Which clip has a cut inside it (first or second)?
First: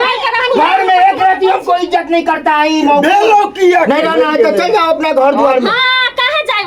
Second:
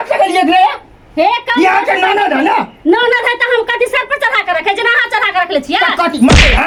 first